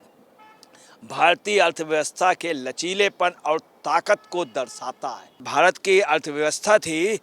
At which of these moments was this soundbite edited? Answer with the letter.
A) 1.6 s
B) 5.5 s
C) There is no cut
B